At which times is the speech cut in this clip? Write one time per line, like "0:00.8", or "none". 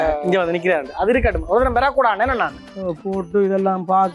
0:02.7